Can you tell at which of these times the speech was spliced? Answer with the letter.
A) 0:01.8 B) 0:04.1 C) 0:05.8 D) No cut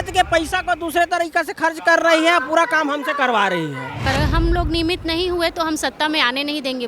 B